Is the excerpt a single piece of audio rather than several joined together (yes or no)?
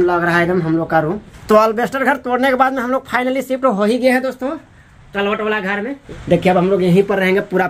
no